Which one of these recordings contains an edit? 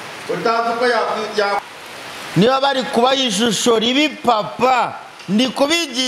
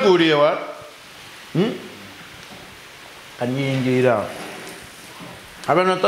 first; 1 cut; at 1.6 s

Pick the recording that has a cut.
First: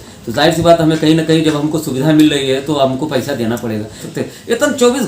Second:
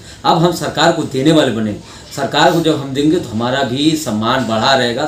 first; 1 cut; at 4.0 s

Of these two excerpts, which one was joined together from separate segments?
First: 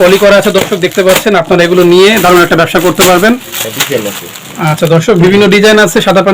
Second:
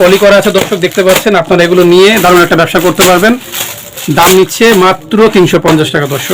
first; 1 cut; at 3.7 s

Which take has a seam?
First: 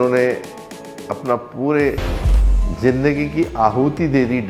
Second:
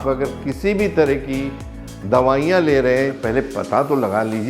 second; 1 cut; at 3.2 s

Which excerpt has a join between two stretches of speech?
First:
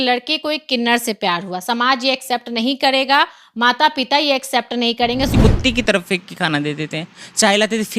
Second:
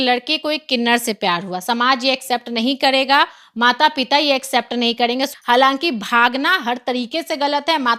first; 1 cut; at 5.4 s

